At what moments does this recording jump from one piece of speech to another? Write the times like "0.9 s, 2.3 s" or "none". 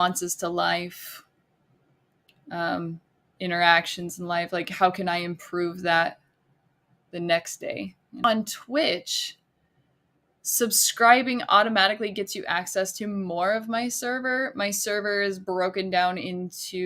8.2 s